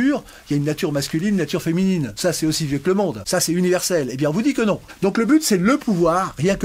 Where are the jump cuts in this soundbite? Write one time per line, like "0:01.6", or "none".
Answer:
0:02.1
0:03.2
0:04.9